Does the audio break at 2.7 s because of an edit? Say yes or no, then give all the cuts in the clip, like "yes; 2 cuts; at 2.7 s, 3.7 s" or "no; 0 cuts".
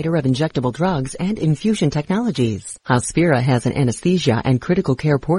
yes; 1 cut; at 2.7 s